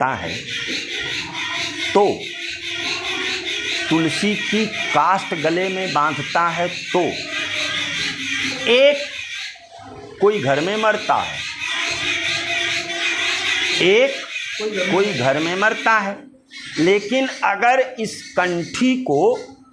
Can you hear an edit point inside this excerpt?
no; 0 cuts

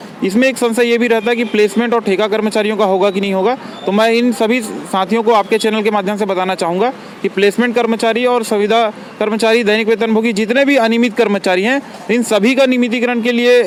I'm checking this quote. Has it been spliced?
no; 0 cuts

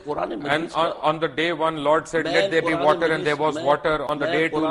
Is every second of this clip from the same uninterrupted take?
yes; 0 cuts

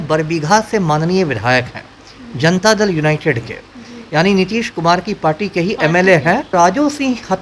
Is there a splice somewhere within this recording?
yes; 1 cut; at 6.5 s

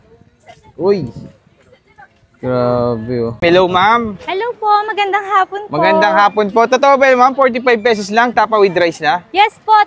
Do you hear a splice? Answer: yes; 1 cut; at 3.3 s

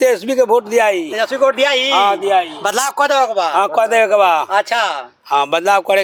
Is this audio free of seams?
yes; 0 cuts

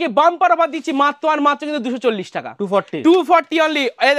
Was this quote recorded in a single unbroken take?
yes; 0 cuts

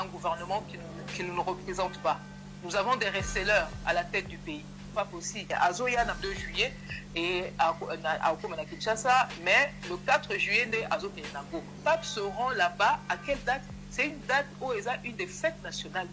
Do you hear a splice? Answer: yes; 3 cuts; at 5.2 s, 6.2 s, 11.8 s

